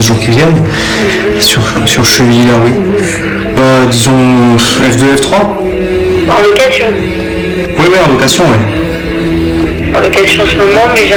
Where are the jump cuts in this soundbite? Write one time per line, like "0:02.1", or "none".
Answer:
none